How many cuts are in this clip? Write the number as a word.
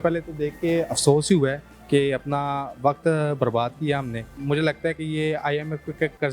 one